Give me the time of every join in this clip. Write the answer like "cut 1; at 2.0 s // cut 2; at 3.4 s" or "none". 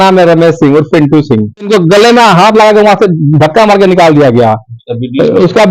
cut 1; at 1.7 s